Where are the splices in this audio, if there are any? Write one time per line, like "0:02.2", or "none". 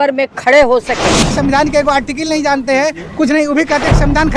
0:01.4